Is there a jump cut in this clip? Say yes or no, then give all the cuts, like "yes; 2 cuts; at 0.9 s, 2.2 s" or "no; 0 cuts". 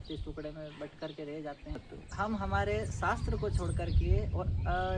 yes; 1 cut; at 1.9 s